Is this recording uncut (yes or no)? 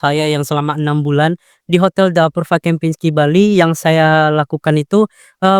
yes